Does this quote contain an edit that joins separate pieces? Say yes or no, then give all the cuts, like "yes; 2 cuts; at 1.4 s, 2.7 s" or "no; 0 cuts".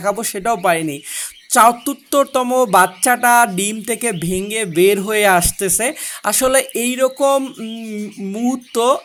no; 0 cuts